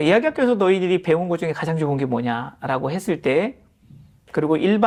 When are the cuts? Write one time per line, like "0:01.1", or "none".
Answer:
none